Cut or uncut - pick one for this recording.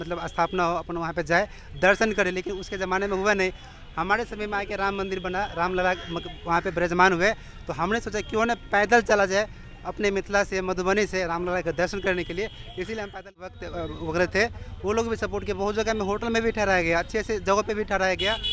cut